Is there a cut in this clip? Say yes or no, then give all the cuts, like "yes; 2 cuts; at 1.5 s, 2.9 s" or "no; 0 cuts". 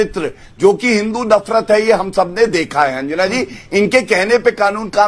no; 0 cuts